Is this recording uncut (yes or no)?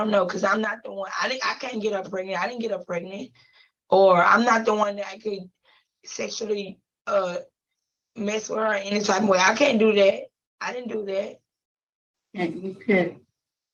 yes